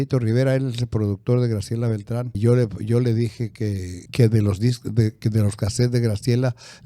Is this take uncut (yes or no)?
yes